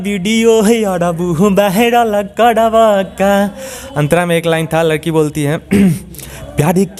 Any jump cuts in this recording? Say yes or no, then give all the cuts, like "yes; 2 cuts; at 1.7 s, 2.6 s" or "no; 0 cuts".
no; 0 cuts